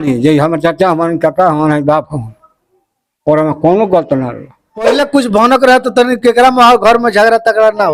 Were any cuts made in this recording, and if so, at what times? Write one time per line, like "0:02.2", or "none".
0:05.0

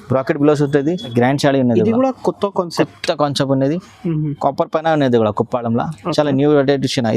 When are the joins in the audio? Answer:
0:01.1

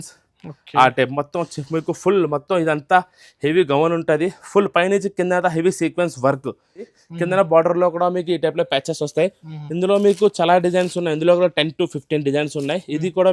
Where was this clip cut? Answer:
0:07.0

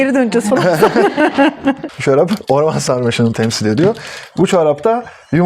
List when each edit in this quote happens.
0:01.9

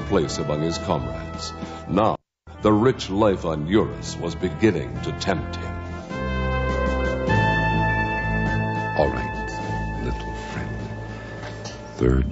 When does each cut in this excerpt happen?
0:09.4

